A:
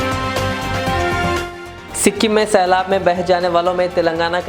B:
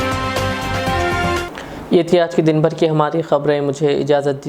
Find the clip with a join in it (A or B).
A